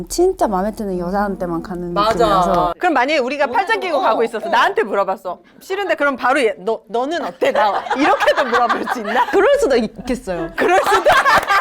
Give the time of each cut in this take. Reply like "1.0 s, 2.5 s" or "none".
2.8 s, 9.3 s